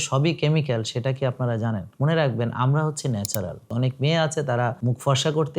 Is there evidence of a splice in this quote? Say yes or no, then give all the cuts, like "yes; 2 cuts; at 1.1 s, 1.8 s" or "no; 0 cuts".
yes; 3 cuts; at 1.9 s, 3.6 s, 4.8 s